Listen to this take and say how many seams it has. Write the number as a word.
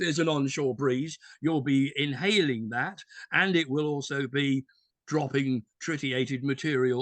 zero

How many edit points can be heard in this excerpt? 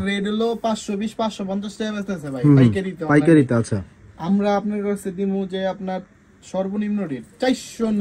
zero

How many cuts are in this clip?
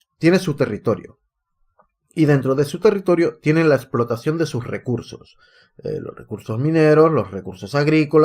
one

